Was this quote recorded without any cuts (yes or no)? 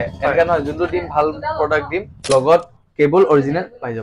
no